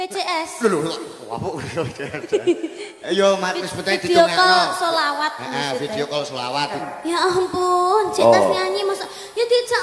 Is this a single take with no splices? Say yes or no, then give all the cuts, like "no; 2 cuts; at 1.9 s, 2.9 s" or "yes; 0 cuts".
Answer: no; 1 cut; at 6.8 s